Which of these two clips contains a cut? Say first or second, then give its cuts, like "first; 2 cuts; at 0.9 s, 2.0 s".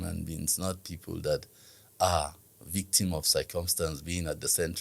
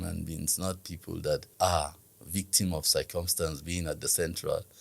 second; 1 cut; at 1.5 s